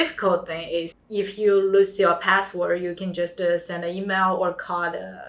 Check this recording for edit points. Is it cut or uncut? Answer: cut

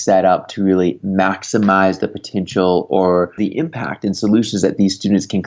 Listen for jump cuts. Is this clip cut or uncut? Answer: cut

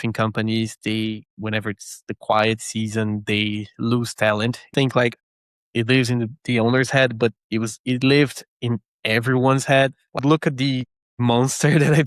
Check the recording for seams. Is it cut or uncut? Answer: cut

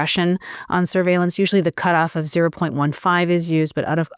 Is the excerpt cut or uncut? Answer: uncut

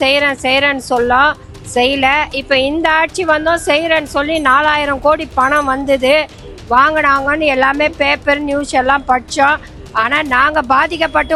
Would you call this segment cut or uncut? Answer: uncut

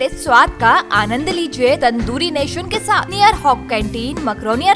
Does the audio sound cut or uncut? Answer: cut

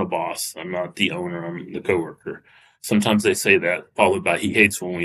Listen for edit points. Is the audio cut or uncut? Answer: uncut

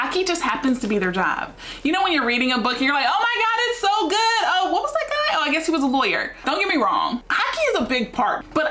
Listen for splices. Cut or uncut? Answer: uncut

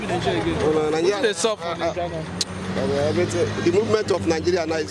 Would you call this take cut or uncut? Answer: uncut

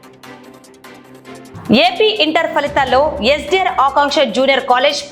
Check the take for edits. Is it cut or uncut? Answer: cut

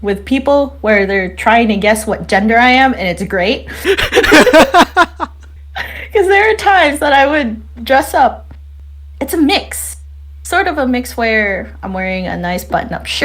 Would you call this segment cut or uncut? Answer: uncut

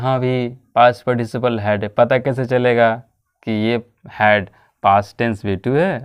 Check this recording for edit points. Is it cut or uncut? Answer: uncut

